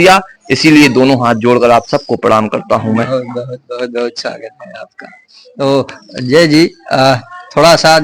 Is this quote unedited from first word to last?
yes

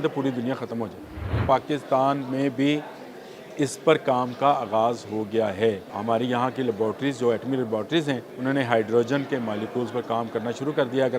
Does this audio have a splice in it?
yes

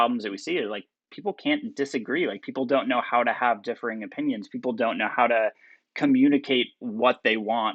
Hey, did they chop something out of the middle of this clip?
no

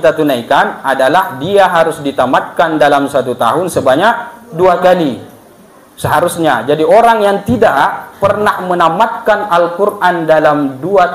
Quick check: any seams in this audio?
no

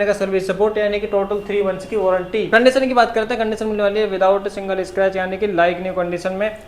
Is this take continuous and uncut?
no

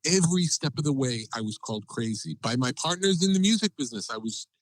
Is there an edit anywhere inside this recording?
yes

